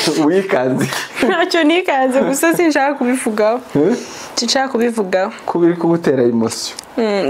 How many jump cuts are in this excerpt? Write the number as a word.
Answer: one